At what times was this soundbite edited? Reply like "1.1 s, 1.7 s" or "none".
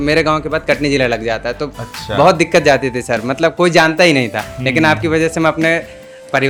none